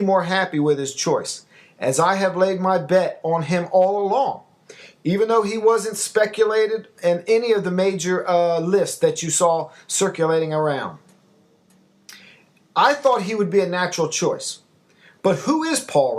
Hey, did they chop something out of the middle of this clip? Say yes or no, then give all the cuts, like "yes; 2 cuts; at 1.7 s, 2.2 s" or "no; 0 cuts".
yes; 1 cut; at 4.9 s